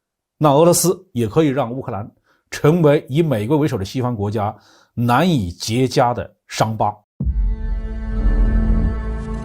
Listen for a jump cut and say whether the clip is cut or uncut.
cut